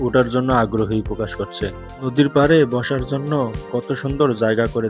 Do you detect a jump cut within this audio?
yes; 1 cut; at 2.0 s

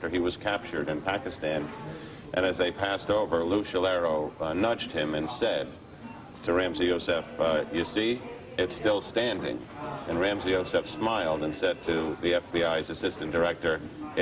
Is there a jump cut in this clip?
yes; 1 cut; at 3.1 s

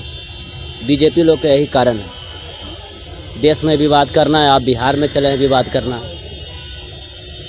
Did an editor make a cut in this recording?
no; 0 cuts

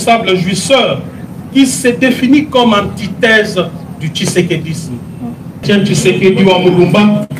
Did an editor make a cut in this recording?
yes; 1 cut; at 5.6 s

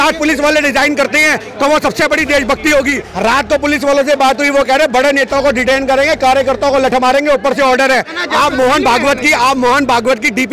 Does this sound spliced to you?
yes; 2 cuts; at 3.1 s, 8.2 s

